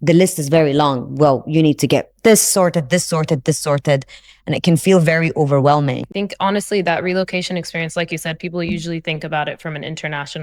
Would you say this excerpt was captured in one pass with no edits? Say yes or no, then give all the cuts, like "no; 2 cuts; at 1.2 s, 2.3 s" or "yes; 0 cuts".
no; 1 cut; at 6.1 s